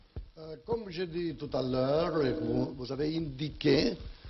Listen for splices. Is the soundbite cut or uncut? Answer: cut